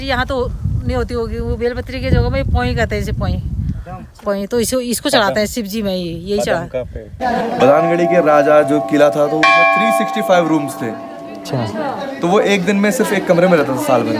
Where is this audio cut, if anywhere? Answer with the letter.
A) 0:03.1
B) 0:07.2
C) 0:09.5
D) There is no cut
B